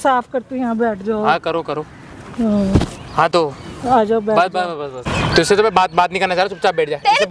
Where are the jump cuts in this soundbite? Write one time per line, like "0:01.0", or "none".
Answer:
none